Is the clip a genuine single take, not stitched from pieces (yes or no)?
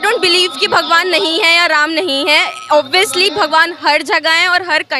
yes